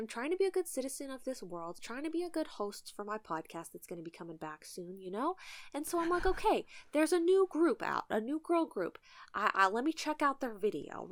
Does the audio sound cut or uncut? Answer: uncut